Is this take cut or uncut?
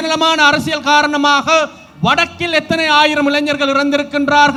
uncut